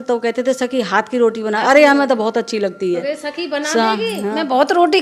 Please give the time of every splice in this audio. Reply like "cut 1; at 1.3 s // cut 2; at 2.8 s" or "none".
none